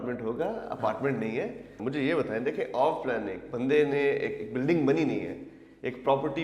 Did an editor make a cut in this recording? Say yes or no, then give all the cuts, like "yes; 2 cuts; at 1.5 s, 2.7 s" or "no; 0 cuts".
yes; 1 cut; at 1.8 s